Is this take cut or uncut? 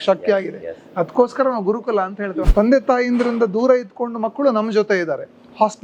cut